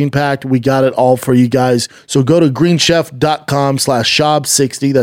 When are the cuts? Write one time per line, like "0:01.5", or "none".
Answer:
0:02.0